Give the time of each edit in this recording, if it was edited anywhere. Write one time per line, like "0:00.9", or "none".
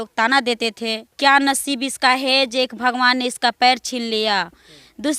0:01.1